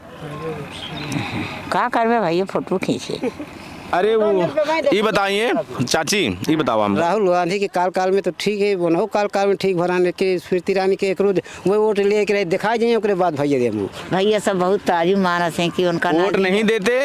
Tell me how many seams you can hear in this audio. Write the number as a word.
two